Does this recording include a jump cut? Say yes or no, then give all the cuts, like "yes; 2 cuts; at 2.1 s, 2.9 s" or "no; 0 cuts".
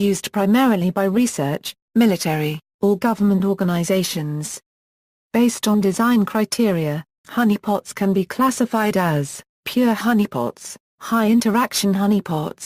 no; 0 cuts